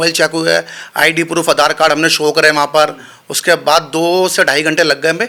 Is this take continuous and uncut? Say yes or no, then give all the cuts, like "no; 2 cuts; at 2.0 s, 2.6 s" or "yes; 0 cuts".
yes; 0 cuts